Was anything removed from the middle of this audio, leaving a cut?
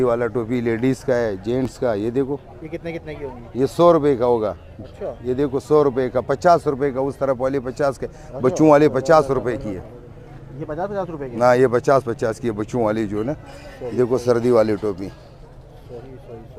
no; 0 cuts

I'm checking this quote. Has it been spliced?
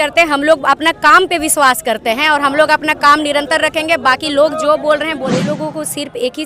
yes; 1 cut; at 5.4 s

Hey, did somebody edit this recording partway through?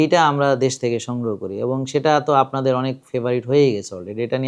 no; 0 cuts

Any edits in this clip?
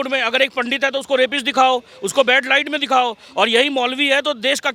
no; 0 cuts

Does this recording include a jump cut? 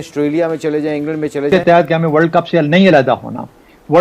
yes; 1 cut; at 1.5 s

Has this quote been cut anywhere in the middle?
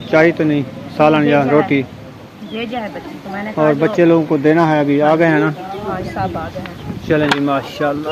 no; 0 cuts

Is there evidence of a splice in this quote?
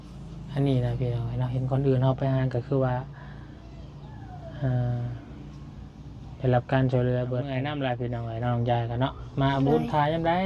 yes; 1 cut; at 7.6 s

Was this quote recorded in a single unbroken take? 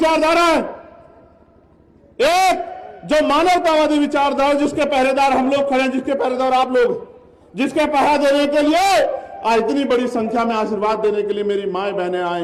yes; 0 cuts

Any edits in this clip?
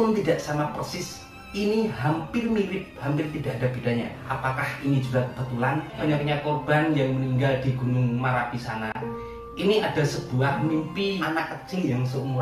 yes; 3 cuts; at 4.2 s, 6.0 s, 11.2 s

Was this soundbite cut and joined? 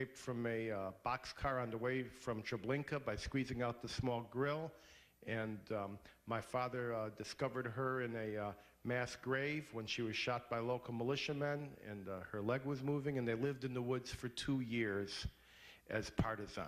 no; 0 cuts

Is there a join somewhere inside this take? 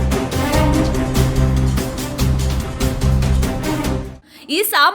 yes; 1 cut; at 3.7 s

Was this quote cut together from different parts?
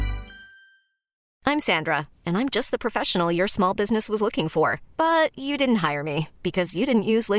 yes; 1 cut; at 1.3 s

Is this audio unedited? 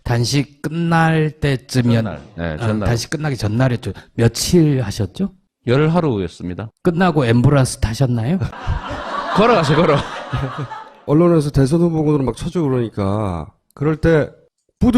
no; 1 cut; at 11.7 s

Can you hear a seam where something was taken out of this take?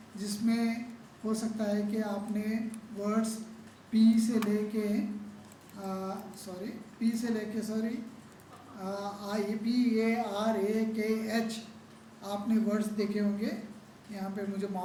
no; 0 cuts

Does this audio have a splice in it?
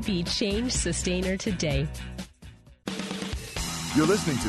yes; 1 cut; at 2.7 s

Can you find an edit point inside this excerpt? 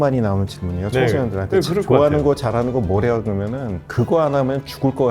no; 0 cuts

